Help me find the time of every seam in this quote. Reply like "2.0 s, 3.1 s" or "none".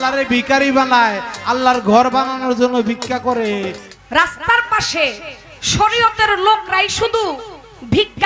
3.8 s